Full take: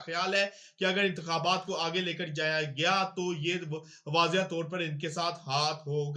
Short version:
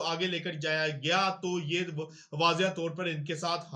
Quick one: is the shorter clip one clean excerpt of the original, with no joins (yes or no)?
yes